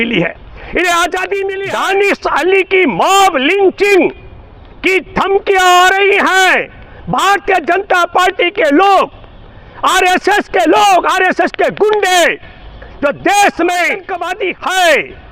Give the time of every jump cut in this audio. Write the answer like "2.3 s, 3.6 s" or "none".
1.6 s, 14.2 s